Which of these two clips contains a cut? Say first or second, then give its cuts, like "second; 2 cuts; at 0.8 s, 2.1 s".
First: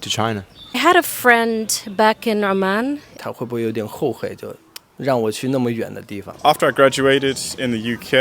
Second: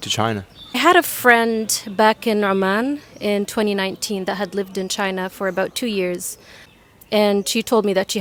first; 2 cuts; at 3.2 s, 6.3 s